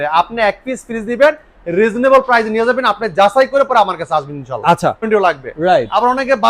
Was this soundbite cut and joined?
yes; 1 cut; at 5.1 s

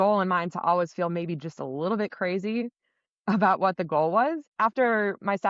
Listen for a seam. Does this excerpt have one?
yes; 1 cut; at 4.5 s

